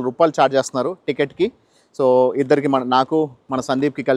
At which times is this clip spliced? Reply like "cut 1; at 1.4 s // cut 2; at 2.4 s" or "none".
none

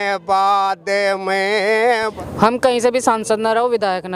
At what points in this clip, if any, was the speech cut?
cut 1; at 2.1 s

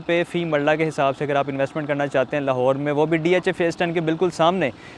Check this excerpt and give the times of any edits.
none

